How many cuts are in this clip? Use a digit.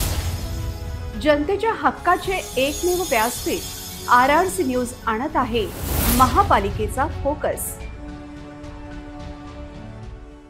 0